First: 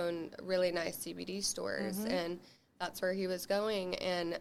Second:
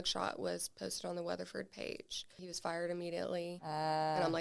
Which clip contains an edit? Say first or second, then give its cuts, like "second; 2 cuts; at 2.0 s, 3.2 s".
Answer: second; 2 cuts; at 2.4 s, 3.6 s